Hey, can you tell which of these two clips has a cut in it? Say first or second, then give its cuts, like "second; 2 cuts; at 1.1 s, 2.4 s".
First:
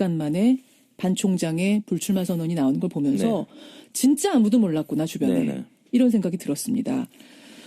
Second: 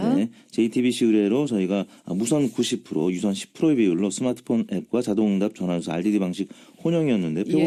first; 1 cut; at 3.1 s